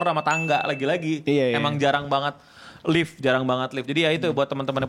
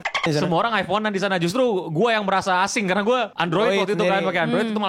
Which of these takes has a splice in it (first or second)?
second